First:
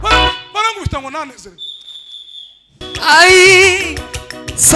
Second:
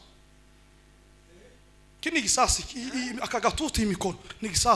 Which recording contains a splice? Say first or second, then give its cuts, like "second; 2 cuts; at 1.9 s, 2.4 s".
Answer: first; 1 cut; at 2.8 s